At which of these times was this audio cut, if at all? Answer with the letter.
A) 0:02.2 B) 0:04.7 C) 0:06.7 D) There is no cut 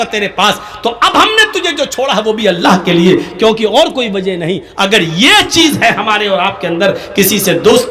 D